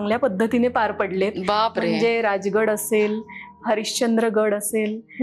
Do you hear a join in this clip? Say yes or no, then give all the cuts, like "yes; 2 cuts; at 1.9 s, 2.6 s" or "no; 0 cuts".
no; 0 cuts